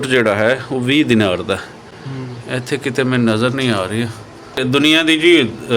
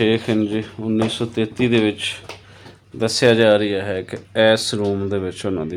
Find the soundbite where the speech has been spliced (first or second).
first